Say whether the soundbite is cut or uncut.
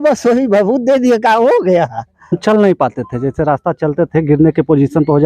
cut